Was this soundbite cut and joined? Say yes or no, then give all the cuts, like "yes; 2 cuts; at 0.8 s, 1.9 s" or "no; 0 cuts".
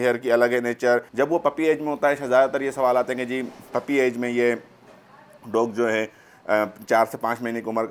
yes; 1 cut; at 1.1 s